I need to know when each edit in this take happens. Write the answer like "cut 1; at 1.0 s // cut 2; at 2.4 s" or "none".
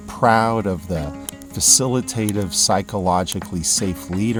none